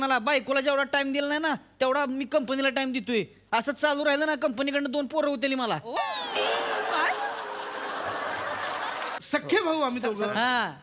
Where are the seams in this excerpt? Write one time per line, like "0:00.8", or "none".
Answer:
0:09.2